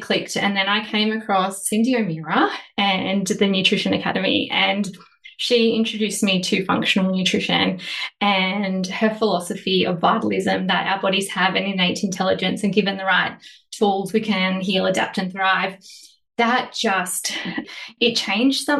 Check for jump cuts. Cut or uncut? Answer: cut